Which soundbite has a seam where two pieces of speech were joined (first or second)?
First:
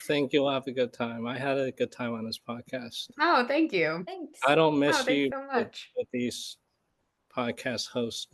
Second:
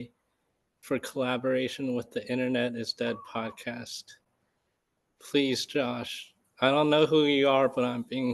first